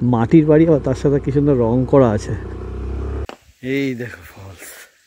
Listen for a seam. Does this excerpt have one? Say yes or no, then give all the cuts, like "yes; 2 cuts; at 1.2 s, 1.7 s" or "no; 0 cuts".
yes; 1 cut; at 3.2 s